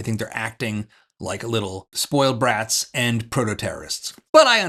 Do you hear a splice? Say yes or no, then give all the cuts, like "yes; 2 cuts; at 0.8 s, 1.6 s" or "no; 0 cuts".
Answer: no; 0 cuts